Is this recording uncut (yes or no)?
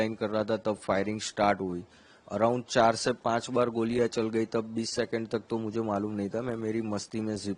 yes